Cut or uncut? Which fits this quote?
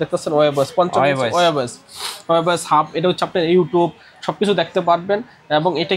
uncut